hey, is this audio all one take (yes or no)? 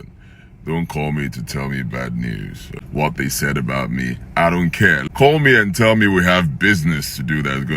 no